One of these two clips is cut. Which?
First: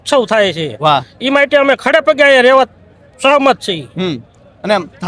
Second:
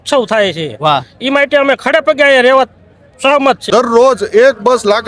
second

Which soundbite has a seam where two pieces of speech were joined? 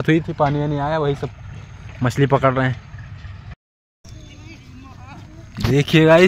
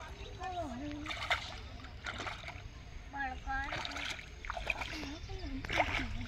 first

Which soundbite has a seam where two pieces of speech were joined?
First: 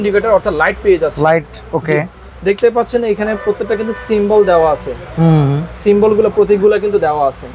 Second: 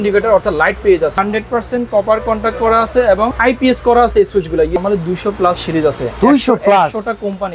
second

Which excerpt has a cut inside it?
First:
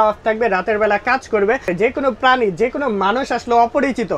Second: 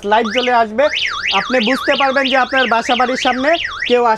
first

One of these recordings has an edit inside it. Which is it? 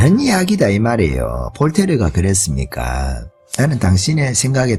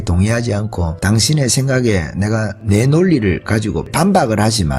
second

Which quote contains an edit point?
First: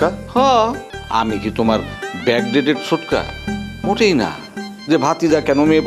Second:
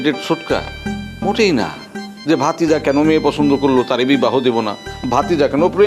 first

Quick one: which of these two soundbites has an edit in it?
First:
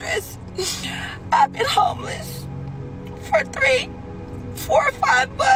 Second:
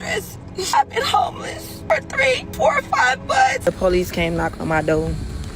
second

